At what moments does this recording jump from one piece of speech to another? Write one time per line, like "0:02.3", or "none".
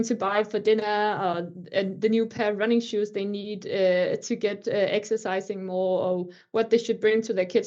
none